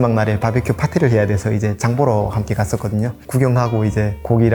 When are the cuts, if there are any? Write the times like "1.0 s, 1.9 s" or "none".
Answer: none